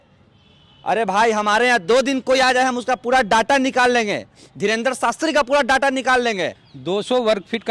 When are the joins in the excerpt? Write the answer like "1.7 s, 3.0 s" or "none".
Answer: 6.7 s